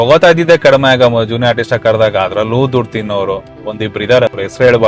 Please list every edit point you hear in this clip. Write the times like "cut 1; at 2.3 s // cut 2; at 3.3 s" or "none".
none